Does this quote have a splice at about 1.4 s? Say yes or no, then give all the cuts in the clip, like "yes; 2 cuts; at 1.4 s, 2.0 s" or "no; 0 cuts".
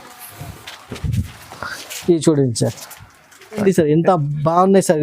no; 1 cut; at 3.6 s